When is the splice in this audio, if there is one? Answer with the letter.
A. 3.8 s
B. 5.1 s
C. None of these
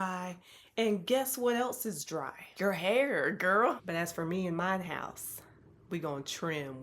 A